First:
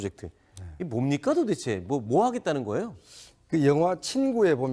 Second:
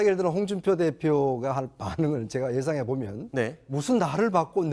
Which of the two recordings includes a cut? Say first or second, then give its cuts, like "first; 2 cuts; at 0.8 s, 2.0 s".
second; 1 cut; at 0.9 s